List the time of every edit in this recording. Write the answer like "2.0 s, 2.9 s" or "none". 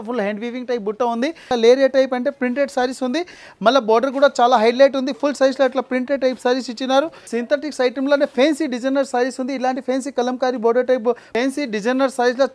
1.5 s, 7.2 s, 11.3 s